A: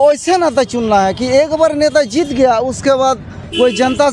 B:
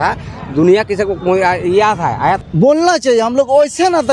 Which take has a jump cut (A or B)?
B